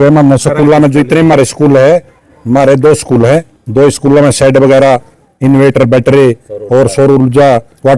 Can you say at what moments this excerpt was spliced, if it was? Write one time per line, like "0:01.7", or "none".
none